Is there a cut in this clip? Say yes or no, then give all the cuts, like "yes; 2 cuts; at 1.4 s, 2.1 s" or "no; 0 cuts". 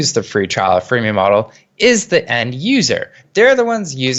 no; 0 cuts